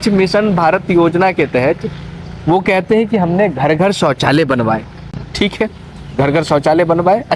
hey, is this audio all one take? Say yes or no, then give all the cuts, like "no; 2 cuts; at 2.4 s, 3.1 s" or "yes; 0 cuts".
yes; 0 cuts